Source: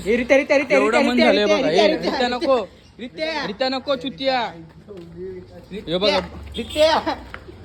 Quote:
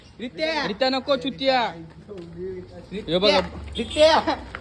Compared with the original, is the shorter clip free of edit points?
yes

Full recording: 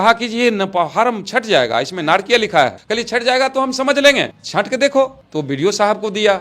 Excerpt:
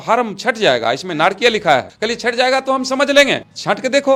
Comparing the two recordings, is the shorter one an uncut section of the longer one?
yes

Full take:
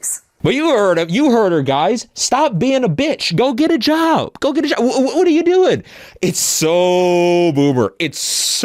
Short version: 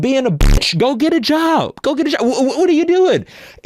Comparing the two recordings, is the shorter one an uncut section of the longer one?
yes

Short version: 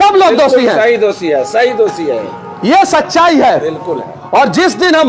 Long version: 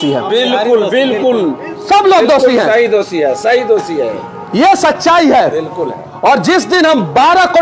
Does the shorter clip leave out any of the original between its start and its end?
no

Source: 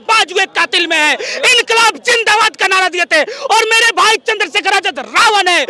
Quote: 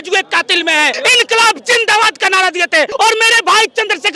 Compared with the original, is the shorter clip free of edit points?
no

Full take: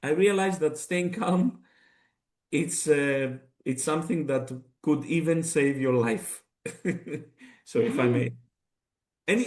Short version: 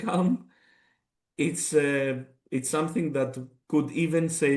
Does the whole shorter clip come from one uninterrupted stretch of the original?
yes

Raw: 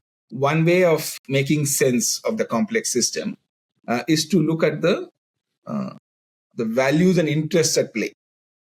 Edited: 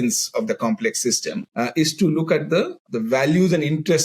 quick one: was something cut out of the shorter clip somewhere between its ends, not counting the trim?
yes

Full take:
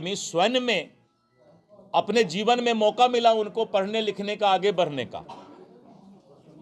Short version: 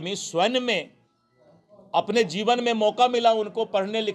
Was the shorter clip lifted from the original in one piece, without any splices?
yes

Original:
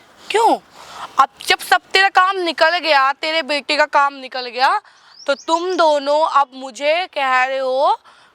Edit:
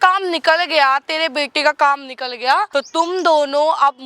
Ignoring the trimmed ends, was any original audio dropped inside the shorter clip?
yes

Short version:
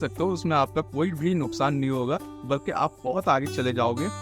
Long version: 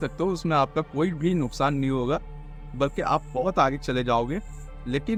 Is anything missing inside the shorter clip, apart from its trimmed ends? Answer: yes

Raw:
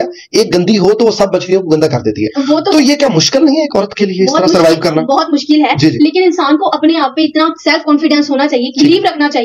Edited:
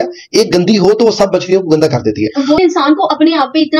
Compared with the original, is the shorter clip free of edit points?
no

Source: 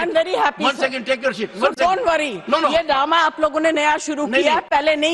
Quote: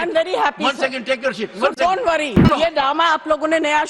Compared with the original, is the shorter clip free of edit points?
no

